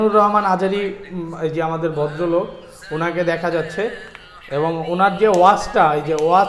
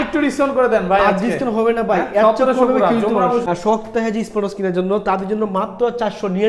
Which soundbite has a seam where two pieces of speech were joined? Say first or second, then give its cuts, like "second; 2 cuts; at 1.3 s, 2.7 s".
second; 1 cut; at 3.4 s